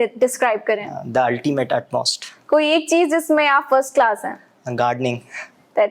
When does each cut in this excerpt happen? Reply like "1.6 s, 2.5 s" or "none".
none